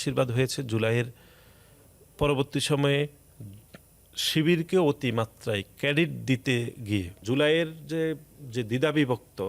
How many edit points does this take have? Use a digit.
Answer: 2